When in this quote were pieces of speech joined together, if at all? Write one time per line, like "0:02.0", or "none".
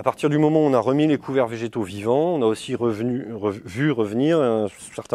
none